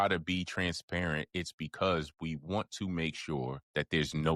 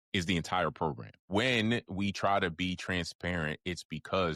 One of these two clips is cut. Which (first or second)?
second